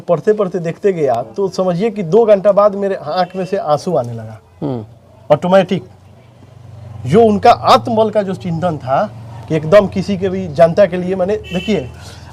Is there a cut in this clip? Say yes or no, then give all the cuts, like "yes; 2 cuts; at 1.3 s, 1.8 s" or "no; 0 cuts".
no; 0 cuts